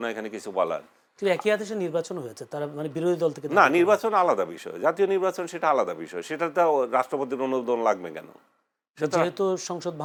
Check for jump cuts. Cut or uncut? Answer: uncut